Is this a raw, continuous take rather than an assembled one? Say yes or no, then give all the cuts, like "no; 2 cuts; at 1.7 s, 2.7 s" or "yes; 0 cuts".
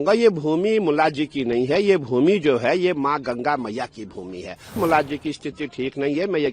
no; 1 cut; at 4.8 s